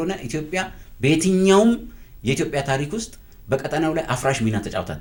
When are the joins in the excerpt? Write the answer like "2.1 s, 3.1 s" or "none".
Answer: none